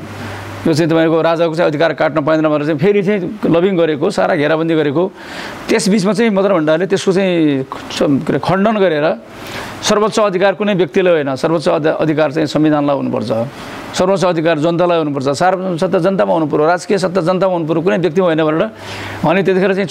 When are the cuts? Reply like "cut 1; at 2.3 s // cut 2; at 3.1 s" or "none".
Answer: none